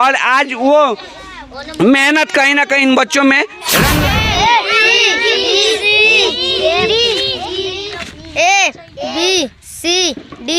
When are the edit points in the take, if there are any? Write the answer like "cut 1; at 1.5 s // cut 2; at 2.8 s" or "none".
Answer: cut 1; at 4.0 s